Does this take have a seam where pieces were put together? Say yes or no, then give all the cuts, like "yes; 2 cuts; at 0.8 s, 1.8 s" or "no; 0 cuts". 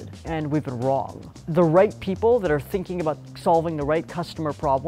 yes; 1 cut; at 1.2 s